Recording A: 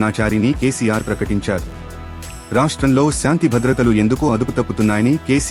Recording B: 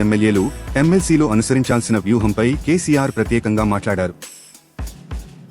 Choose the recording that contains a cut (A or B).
B